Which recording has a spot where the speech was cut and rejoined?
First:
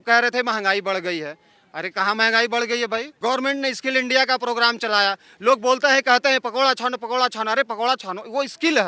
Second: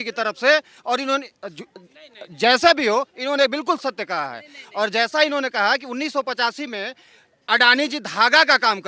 first; 1 cut; at 3.1 s

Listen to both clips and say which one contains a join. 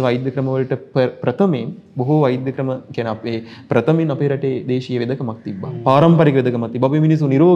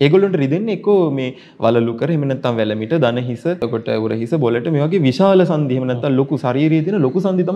second; 1 cut; at 3.6 s

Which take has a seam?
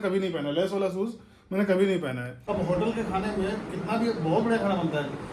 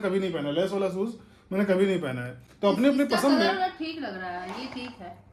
first; 1 cut; at 2.4 s

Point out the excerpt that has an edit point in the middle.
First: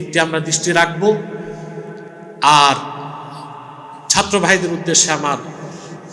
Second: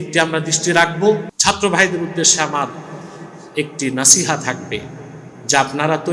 second; 1 cut; at 1.3 s

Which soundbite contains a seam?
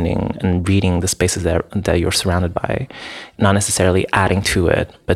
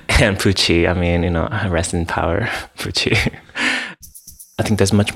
second; 1 cut; at 4.1 s

